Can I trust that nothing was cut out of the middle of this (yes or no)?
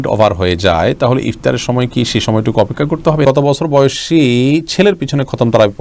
no